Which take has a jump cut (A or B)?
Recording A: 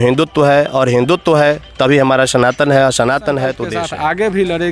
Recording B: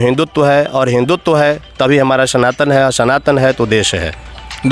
A